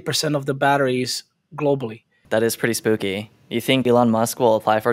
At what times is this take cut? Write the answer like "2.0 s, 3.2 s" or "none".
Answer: 2.2 s, 3.8 s